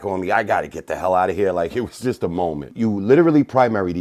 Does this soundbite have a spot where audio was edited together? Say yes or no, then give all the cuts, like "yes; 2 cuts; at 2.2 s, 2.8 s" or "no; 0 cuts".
yes; 1 cut; at 2.7 s